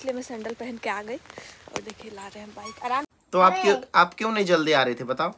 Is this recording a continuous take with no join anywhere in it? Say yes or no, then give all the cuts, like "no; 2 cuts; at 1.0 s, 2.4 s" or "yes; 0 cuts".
no; 1 cut; at 3.1 s